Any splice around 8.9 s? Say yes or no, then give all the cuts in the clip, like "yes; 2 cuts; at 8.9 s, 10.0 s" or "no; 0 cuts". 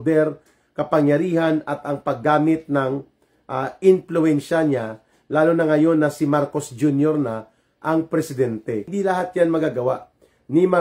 yes; 1 cut; at 8.9 s